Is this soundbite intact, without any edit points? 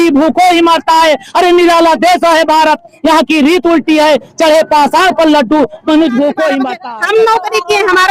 no; 1 cut; at 6.7 s

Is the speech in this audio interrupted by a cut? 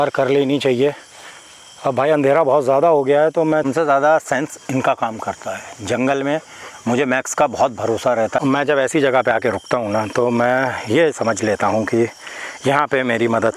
yes; 2 cuts; at 3.7 s, 8.4 s

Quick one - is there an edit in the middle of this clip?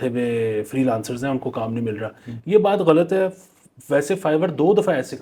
no; 0 cuts

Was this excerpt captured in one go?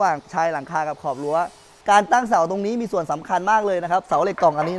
no; 1 cut; at 1.7 s

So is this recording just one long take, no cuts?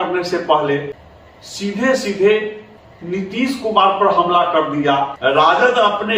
no; 1 cut; at 5.1 s

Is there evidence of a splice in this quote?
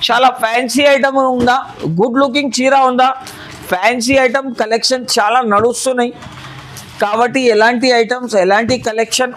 no; 0 cuts

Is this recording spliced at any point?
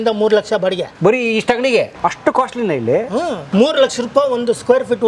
yes; 3 cuts; at 0.9 s, 1.9 s, 3.4 s

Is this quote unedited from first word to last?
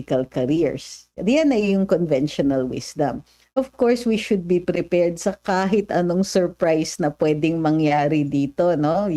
yes; 0 cuts

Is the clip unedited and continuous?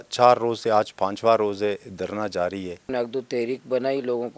no; 1 cut; at 2.9 s

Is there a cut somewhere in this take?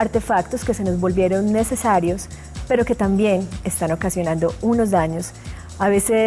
yes; 1 cut; at 2.3 s

